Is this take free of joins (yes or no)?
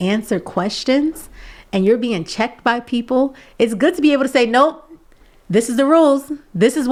yes